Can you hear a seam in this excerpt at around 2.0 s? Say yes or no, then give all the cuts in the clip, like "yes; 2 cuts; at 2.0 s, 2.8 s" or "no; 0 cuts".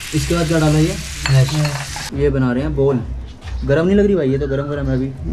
yes; 1 cut; at 2.0 s